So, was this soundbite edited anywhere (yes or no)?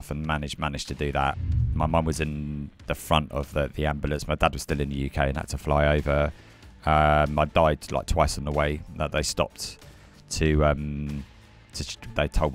yes